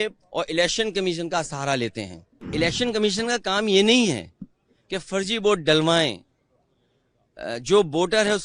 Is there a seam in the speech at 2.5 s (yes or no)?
yes